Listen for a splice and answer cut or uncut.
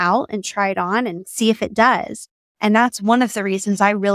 uncut